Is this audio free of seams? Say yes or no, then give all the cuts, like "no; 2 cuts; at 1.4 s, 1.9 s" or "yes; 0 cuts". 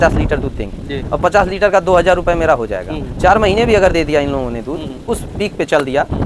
yes; 0 cuts